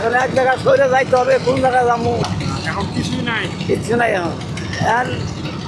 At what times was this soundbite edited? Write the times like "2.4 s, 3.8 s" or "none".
2.3 s

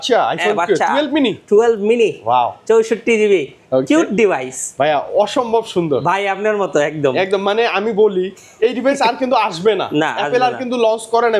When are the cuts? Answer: none

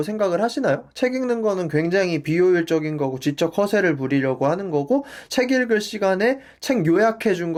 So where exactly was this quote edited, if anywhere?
none

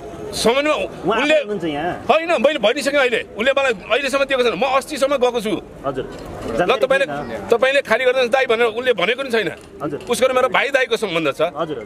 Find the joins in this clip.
none

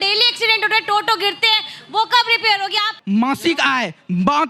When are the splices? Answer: 2.9 s

